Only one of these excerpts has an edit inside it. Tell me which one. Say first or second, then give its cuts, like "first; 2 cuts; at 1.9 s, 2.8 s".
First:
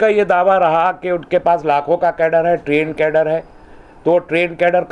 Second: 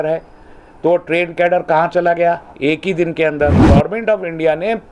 second; 1 cut; at 3.6 s